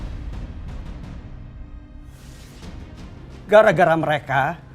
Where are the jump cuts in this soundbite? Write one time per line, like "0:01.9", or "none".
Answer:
0:03.2

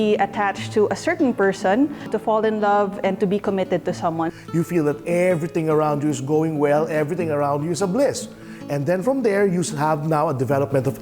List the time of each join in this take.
0:02.1
0:04.3

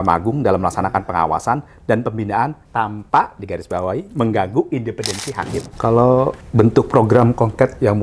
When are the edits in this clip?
0:02.6
0:05.7

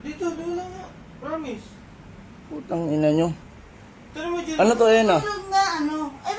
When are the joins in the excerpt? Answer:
0:04.9

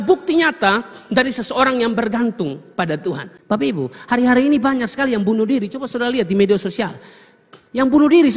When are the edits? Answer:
0:03.3

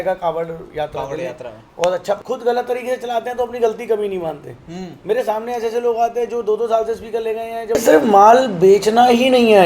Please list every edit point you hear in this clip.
0:02.2
0:07.8

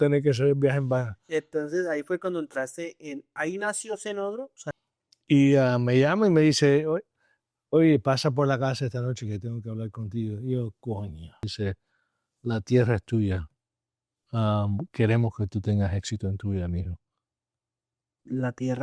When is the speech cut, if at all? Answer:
0:04.7
0:11.5

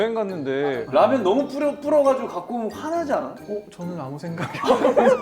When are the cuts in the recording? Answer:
0:00.8
0:03.4

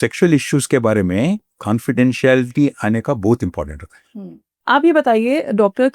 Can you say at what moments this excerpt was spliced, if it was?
0:01.5
0:04.6

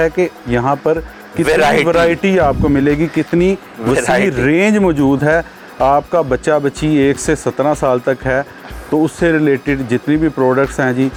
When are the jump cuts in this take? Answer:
none

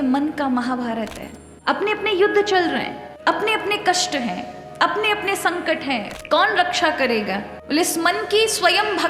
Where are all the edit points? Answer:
0:01.5
0:06.1

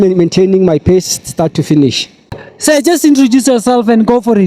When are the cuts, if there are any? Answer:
0:02.5

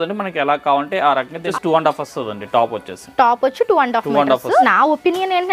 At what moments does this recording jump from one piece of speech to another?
0:01.5
0:04.6

